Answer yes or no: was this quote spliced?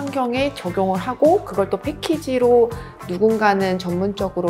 no